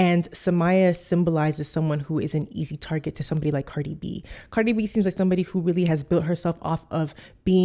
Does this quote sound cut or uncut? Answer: uncut